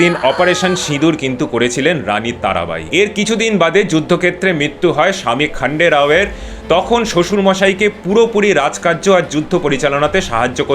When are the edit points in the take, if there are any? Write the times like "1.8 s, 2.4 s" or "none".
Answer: 2.8 s